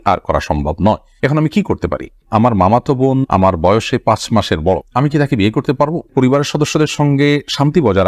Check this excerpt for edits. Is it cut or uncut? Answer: cut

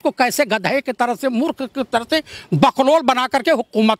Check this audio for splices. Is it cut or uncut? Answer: uncut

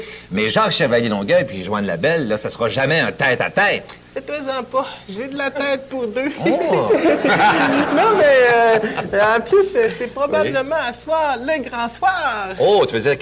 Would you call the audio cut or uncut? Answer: cut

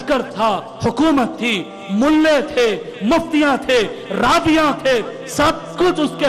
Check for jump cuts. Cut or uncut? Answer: uncut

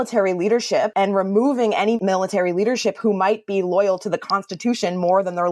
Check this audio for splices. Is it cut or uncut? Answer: cut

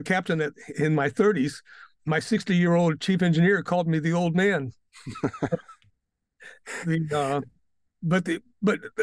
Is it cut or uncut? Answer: uncut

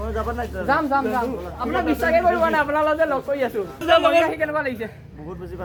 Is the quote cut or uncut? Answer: uncut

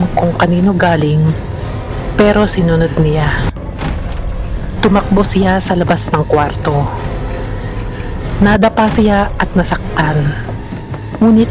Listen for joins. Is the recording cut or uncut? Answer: uncut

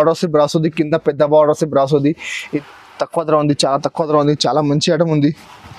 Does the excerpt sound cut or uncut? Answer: cut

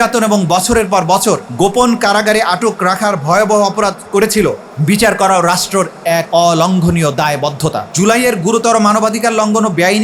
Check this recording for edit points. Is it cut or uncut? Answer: cut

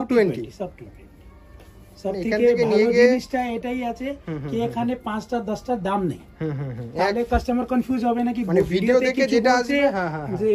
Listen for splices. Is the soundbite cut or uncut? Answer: uncut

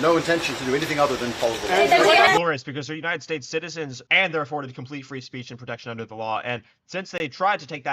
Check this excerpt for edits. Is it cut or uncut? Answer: cut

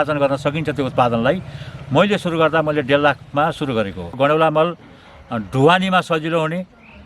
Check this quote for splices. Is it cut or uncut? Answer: cut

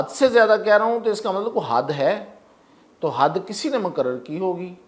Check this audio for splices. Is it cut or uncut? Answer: uncut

